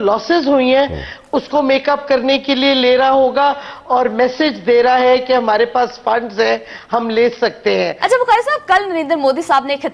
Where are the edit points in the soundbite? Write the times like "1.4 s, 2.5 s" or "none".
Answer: 8.0 s